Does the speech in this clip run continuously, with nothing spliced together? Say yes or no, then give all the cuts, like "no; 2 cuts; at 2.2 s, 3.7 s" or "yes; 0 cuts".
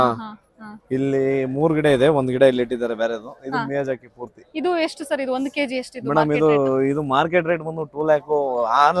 yes; 0 cuts